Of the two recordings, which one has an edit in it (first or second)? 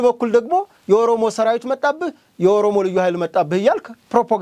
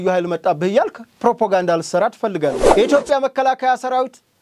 second